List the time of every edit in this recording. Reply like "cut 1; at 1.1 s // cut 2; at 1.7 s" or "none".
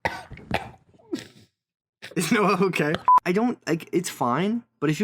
cut 1; at 3.1 s